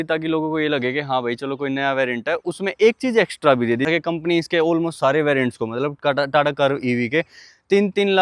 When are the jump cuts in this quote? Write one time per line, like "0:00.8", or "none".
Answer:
0:03.9